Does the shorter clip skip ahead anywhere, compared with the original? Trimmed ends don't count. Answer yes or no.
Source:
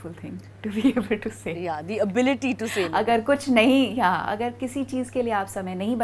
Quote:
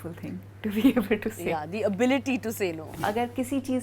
yes